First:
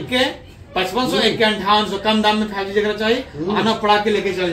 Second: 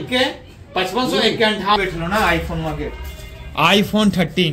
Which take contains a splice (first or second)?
second